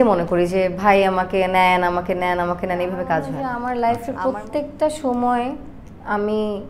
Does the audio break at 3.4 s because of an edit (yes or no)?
yes